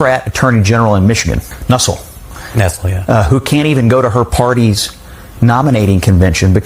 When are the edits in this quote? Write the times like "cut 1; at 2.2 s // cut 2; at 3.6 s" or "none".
none

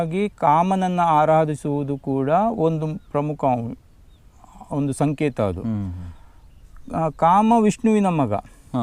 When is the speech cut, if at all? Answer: none

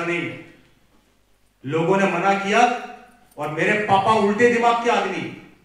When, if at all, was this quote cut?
none

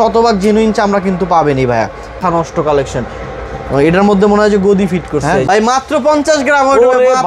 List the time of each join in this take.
cut 1; at 2.4 s // cut 2; at 5.4 s

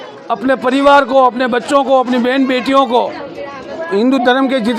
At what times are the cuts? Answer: cut 1; at 3.8 s

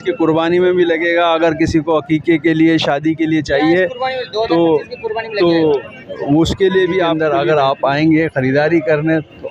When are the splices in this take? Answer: cut 1; at 7.1 s

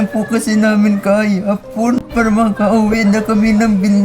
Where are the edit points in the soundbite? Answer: cut 1; at 2.0 s

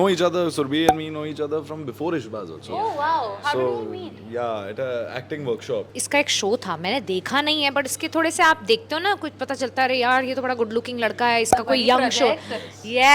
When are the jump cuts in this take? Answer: cut 1; at 5.9 s

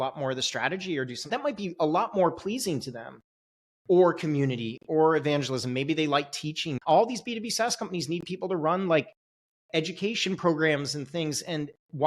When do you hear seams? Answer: cut 1; at 6.7 s

